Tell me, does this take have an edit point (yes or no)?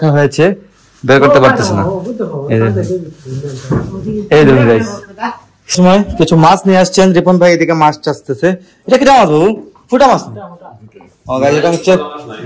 yes